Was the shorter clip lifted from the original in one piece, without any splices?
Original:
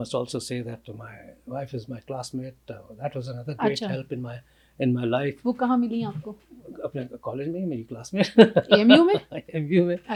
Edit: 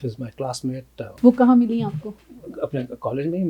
no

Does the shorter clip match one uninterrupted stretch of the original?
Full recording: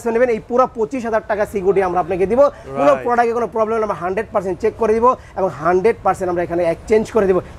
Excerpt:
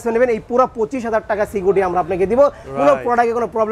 yes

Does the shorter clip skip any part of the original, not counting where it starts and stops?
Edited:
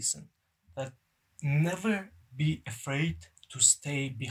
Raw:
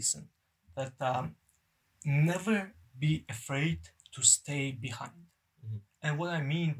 yes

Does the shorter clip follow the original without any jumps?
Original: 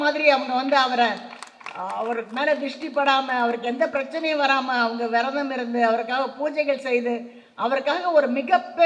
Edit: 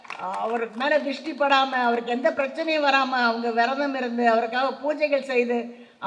yes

